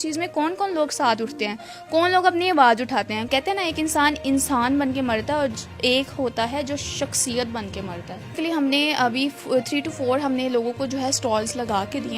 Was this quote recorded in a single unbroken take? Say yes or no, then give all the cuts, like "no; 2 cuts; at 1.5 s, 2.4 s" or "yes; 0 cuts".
no; 2 cuts; at 3.2 s, 8.4 s